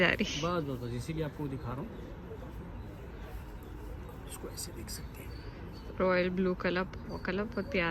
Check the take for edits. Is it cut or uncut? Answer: uncut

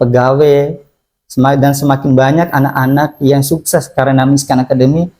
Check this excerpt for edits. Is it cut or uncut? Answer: uncut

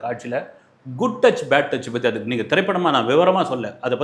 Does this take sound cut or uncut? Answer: uncut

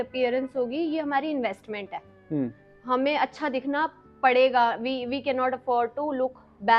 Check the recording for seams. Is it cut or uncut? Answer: uncut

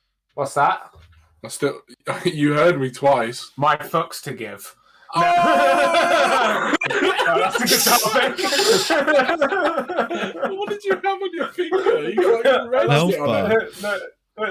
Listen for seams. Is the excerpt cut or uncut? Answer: uncut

